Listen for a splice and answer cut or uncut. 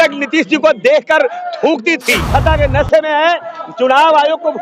cut